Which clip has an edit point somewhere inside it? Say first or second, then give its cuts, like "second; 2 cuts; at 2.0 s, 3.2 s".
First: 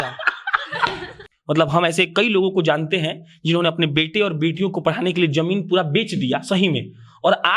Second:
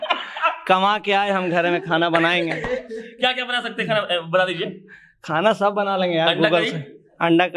first; 1 cut; at 1.1 s